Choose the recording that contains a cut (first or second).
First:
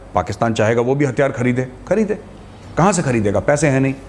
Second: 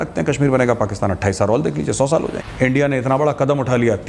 second